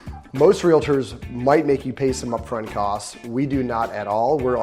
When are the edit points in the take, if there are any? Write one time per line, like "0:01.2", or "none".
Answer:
none

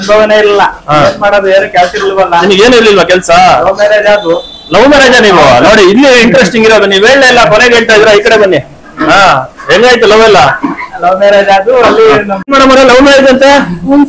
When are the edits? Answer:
0:12.5

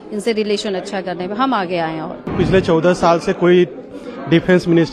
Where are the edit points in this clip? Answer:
none

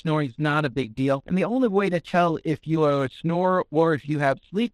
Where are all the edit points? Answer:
0:01.2

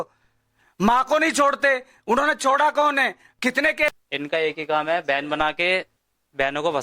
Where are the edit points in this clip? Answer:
0:03.9

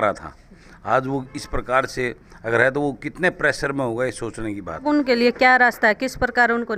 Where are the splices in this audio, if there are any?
0:04.8

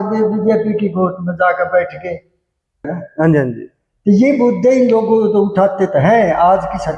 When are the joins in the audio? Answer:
0:02.9

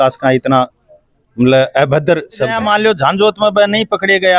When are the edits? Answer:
0:02.5

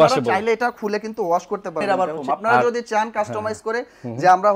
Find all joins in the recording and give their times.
0:01.8

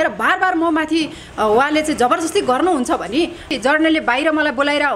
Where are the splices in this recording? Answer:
0:03.5

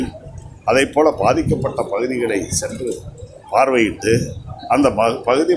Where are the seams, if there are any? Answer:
none

